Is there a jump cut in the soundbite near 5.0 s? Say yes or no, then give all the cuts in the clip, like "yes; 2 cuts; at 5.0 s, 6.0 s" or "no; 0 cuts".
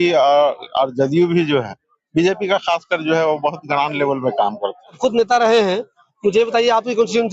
no; 0 cuts